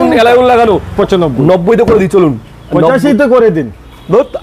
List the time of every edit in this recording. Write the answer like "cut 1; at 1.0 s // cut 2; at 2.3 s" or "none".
cut 1; at 0.9 s

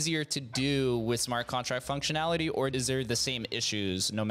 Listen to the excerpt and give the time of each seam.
cut 1; at 2.7 s

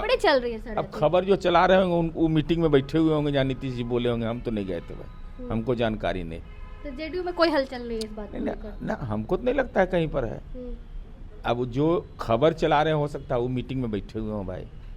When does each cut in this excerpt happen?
none

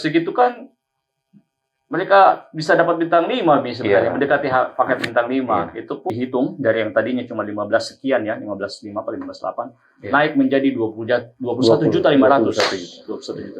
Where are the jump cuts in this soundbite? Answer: cut 1; at 6.0 s

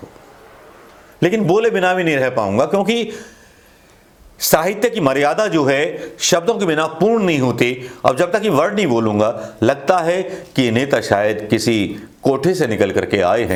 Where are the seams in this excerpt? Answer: none

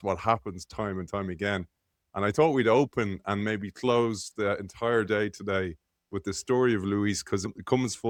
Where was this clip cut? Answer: none

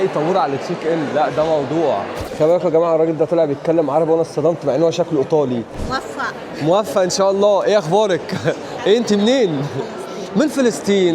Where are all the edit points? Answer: cut 1; at 2.2 s // cut 2; at 5.7 s

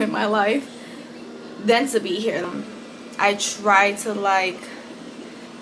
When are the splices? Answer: cut 1; at 2.4 s

